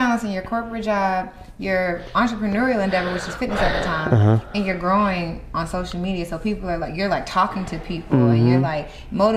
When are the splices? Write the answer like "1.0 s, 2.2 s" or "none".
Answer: none